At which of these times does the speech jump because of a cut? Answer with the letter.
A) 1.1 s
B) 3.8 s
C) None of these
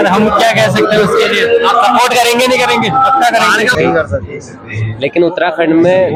C